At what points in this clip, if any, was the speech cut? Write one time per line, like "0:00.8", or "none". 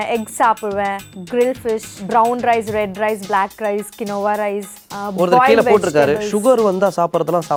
none

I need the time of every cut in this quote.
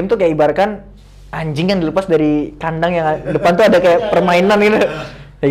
none

